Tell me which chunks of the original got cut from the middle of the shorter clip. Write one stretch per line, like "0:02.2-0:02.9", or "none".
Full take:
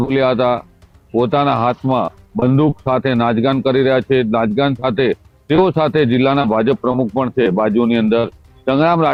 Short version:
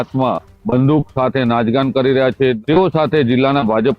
0:04.3-0:05.4

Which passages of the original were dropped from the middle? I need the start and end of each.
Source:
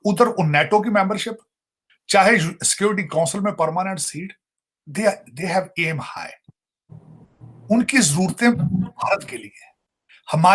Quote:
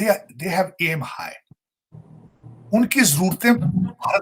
none

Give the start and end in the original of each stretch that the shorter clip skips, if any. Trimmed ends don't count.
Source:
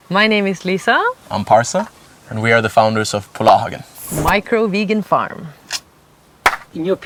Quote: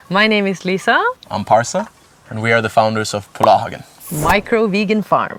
none

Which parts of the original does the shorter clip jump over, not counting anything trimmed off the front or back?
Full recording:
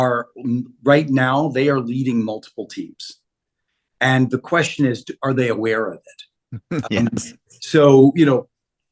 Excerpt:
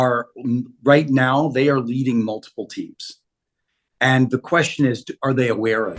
none

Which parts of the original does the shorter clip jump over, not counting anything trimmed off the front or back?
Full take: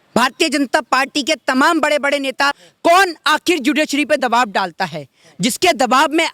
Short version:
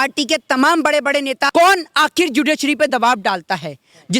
0:02.4-0:02.7

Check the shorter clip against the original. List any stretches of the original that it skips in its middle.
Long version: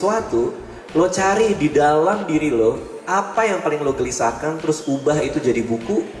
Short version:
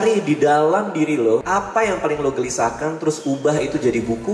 0:02.8-0:03.1

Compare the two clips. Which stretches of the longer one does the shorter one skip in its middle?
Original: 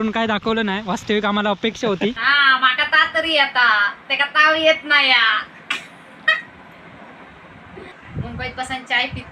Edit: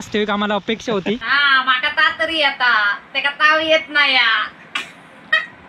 none

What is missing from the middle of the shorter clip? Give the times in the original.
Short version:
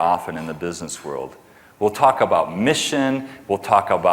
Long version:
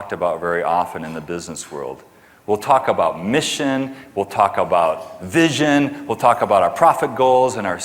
none

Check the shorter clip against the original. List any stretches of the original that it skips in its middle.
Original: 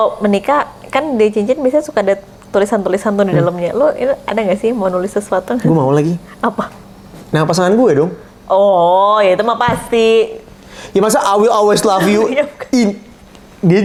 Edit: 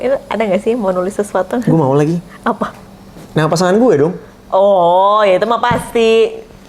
none

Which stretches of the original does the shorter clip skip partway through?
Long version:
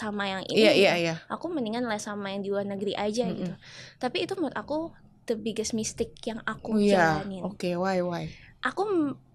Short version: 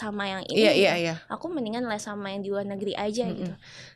none

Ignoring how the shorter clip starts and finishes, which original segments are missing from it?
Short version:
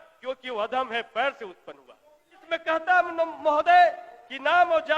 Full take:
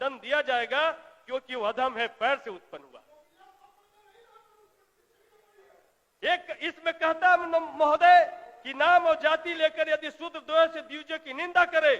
0:03.5-0:06.8

